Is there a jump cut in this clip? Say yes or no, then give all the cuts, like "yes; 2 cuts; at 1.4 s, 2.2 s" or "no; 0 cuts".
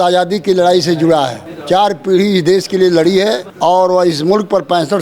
yes; 2 cuts; at 1.5 s, 3.5 s